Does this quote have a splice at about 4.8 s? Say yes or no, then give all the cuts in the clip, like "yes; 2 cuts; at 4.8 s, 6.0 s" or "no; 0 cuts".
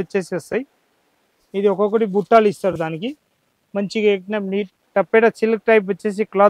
yes; 1 cut; at 4.8 s